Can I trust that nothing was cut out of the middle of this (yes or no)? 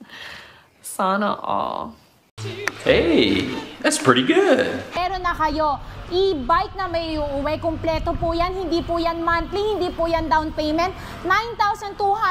yes